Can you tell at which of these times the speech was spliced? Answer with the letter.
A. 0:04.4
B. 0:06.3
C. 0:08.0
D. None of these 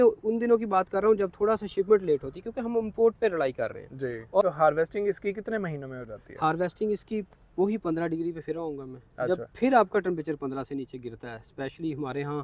A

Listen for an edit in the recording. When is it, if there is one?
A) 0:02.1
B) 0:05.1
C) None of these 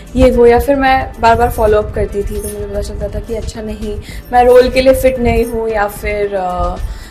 C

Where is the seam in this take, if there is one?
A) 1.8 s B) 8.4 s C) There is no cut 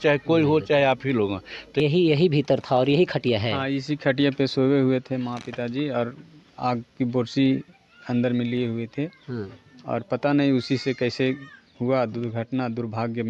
A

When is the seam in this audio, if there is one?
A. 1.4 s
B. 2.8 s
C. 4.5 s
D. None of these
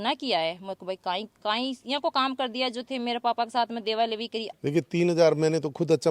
C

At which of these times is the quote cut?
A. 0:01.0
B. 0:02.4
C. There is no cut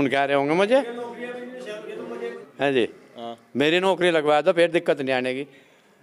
B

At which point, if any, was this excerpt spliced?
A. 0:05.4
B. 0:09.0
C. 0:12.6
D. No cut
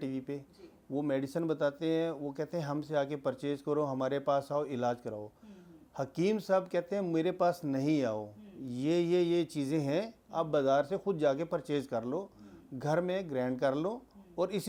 D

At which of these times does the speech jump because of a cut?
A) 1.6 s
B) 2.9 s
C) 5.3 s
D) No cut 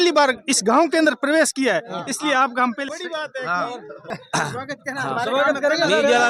D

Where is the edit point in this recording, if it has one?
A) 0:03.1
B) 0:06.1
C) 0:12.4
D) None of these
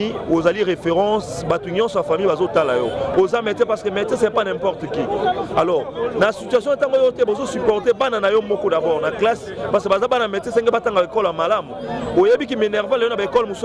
A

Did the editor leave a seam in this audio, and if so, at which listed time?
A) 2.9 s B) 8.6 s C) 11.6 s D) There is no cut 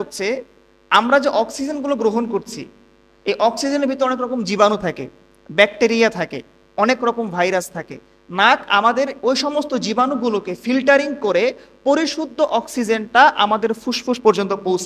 D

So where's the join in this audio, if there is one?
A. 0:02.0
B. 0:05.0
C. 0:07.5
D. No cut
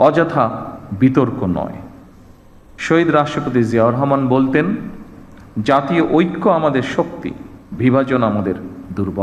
D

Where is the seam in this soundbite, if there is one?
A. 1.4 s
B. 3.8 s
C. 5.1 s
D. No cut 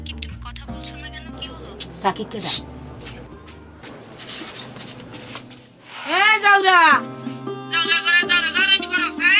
B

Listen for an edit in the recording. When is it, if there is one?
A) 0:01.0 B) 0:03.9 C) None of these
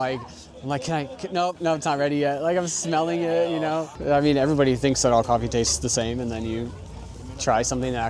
B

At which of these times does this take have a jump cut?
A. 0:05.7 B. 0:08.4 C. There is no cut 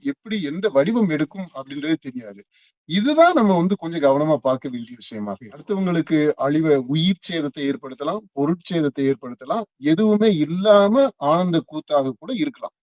A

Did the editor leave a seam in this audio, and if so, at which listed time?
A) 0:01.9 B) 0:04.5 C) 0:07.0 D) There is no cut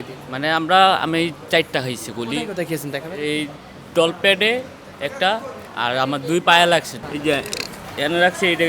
C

